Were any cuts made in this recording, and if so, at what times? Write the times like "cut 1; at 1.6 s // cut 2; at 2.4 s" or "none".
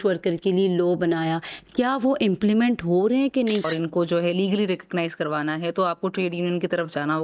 cut 1; at 3.6 s

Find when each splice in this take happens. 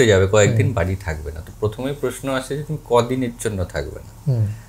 none

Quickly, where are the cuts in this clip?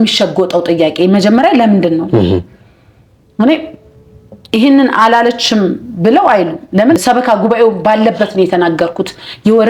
none

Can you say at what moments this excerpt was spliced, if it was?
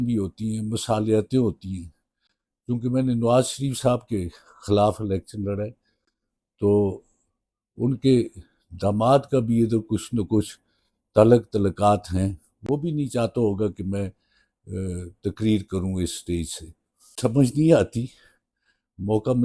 cut 1; at 17.1 s

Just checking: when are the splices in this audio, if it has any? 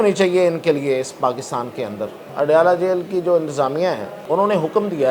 cut 1; at 2.2 s // cut 2; at 4.1 s

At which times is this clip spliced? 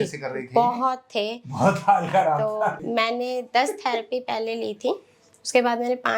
cut 1; at 2.8 s

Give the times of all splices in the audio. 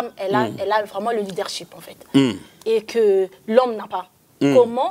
none

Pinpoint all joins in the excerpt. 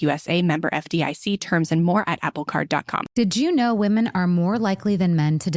cut 1; at 3.0 s

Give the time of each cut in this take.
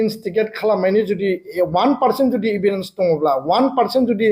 none

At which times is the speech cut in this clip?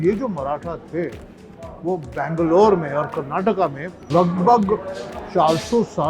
cut 1; at 3.9 s

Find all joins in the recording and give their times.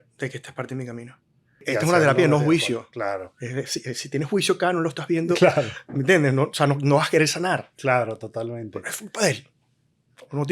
cut 1; at 1.6 s

